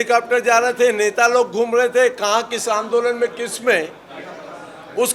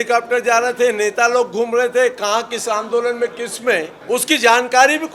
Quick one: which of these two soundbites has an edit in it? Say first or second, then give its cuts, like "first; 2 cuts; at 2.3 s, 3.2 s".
second; 1 cut; at 3.9 s